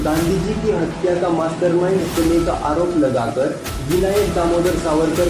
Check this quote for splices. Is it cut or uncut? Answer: uncut